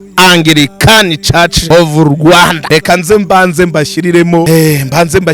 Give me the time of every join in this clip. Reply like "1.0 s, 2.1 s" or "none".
1.6 s, 2.6 s, 4.5 s